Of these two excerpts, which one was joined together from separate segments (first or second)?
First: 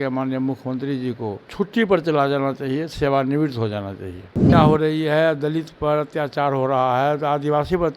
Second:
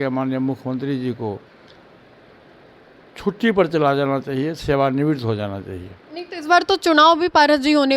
first